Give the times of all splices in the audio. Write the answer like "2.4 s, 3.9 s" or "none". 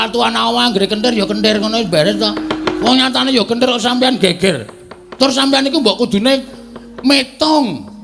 2.8 s